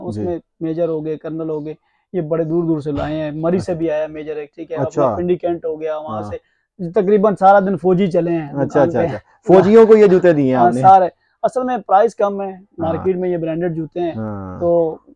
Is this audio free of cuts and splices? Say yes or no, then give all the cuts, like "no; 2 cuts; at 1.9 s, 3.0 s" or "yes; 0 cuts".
yes; 0 cuts